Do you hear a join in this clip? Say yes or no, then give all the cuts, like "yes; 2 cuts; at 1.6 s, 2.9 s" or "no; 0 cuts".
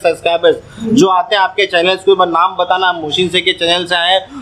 no; 0 cuts